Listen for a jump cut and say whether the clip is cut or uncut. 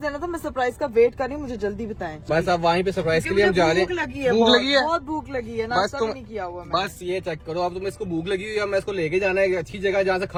uncut